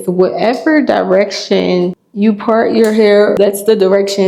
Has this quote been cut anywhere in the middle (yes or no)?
yes